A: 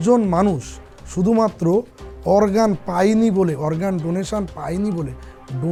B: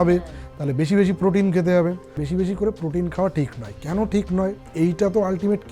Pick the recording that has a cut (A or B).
B